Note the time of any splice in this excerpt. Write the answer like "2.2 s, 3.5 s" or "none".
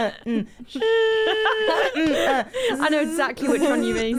none